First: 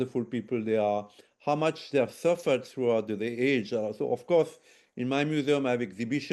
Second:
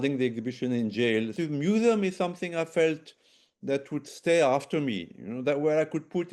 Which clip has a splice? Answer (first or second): second